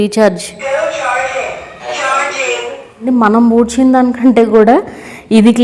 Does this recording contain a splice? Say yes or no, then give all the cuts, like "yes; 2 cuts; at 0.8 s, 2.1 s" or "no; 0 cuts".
yes; 2 cuts; at 1.8 s, 3.0 s